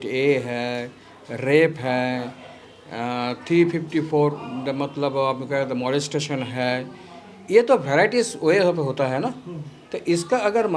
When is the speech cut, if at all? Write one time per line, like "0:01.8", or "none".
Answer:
none